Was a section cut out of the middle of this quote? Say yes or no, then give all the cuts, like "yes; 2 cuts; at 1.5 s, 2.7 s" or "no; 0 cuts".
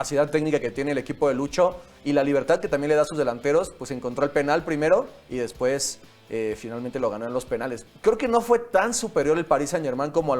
yes; 1 cut; at 7.8 s